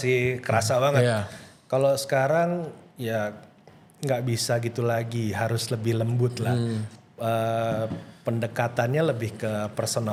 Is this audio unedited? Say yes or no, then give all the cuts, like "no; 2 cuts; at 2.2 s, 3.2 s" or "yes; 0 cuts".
yes; 0 cuts